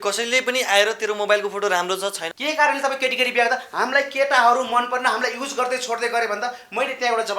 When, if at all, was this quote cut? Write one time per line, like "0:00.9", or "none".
0:02.2